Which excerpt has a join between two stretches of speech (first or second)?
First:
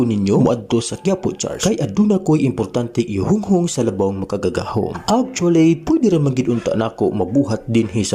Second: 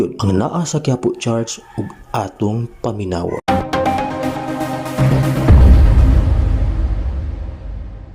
second